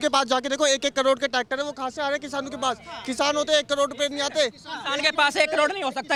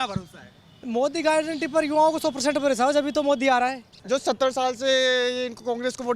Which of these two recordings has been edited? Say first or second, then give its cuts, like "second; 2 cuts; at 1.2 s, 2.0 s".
second; 1 cut; at 3.9 s